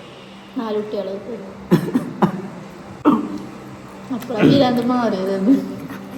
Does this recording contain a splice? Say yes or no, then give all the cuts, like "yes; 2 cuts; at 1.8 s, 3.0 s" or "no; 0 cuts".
no; 0 cuts